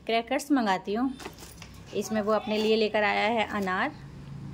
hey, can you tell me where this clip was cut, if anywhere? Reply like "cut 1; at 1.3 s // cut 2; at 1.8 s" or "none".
none